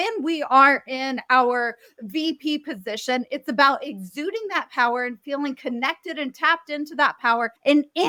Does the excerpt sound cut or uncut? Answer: uncut